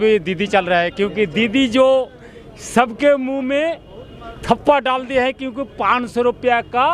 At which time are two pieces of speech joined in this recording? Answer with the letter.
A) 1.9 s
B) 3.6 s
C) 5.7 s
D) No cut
D